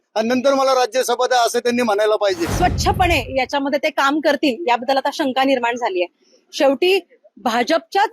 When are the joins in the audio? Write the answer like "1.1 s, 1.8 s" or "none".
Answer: 2.5 s